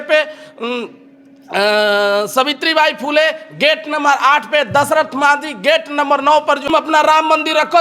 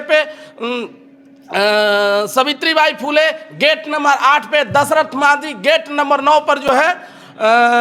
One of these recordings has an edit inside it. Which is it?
first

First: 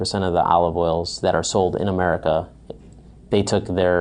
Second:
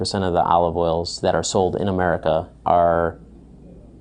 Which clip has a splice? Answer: second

